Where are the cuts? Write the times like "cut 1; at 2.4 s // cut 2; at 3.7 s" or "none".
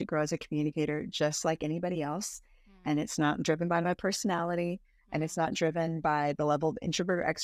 none